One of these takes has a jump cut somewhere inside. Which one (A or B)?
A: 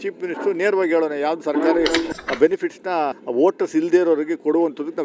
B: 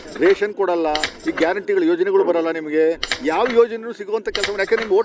A